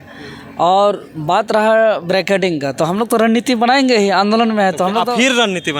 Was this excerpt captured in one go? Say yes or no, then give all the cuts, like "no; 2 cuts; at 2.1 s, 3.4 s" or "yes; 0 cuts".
yes; 0 cuts